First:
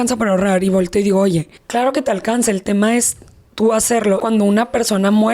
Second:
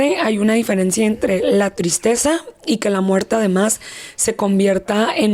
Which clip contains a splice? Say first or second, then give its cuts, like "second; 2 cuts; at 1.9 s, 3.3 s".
first; 2 cuts; at 1.6 s, 4.2 s